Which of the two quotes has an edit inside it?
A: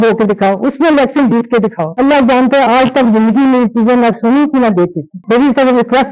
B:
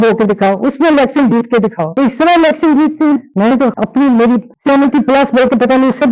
A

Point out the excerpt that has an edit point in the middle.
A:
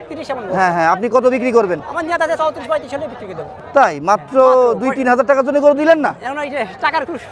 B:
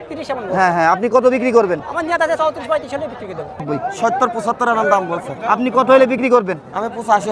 B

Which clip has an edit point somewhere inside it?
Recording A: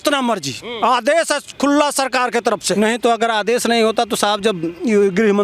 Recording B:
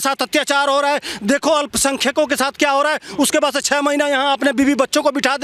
A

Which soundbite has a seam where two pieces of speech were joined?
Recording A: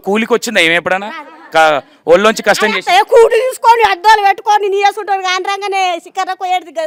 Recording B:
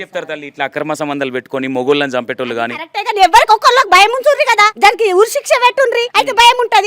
B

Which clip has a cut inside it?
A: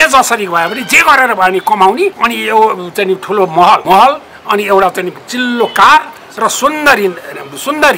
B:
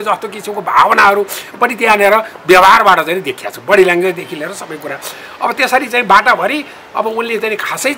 A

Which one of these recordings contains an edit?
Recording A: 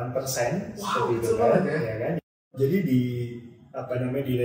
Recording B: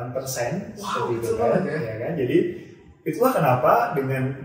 A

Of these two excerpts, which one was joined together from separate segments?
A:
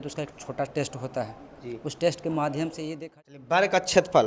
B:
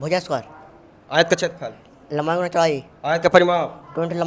A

